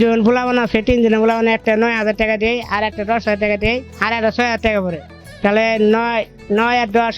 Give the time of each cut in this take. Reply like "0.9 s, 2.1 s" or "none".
none